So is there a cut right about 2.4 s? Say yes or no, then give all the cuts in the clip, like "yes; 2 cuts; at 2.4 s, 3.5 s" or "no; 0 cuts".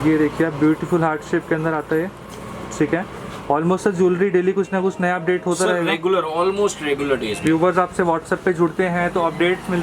no; 0 cuts